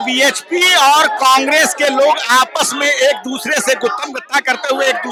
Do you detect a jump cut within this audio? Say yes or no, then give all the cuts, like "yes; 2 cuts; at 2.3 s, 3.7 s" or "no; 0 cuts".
no; 0 cuts